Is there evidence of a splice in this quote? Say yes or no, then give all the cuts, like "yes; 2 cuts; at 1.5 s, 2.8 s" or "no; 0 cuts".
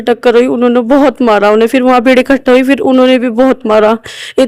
no; 0 cuts